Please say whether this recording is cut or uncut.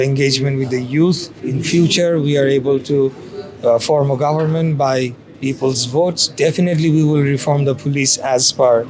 cut